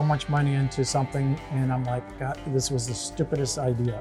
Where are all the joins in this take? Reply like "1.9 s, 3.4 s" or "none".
none